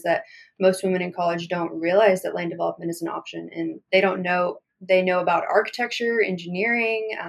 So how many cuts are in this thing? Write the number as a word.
zero